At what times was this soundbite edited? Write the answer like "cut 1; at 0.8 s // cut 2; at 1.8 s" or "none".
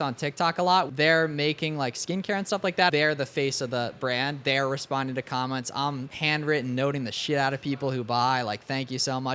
cut 1; at 0.9 s // cut 2; at 2.9 s // cut 3; at 6.1 s